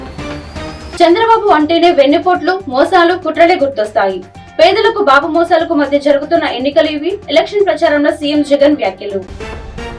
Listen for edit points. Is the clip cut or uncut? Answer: cut